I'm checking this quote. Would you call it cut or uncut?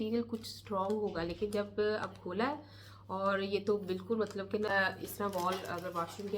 cut